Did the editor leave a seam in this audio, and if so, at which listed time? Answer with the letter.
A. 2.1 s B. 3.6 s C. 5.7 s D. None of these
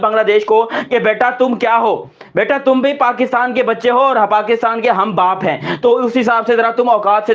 D